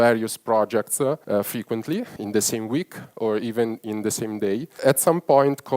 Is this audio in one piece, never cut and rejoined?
no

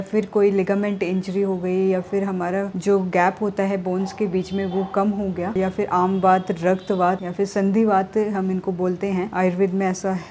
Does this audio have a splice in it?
no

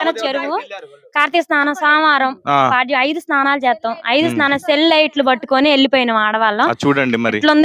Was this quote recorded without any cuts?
yes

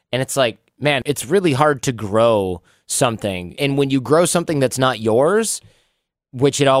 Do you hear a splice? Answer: yes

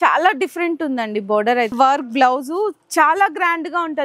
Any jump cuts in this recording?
yes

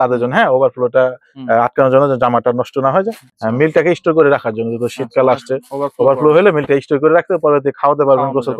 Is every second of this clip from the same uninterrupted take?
no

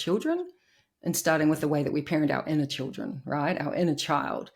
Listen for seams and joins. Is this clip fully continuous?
yes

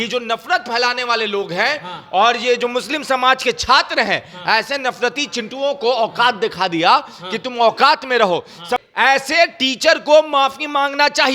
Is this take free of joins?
no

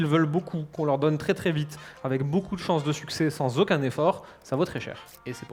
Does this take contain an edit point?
no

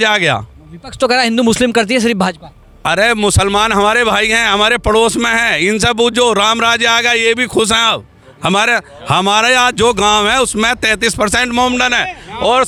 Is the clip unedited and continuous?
yes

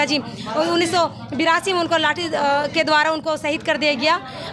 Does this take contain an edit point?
no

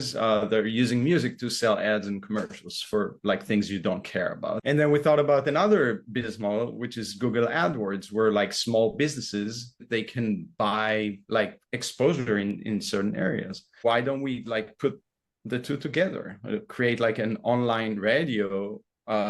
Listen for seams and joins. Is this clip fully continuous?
no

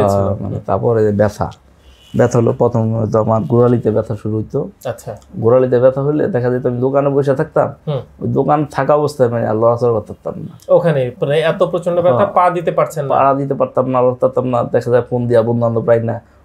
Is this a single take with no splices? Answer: yes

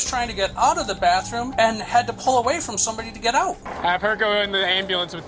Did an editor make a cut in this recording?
yes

